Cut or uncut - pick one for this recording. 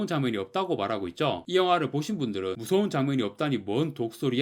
cut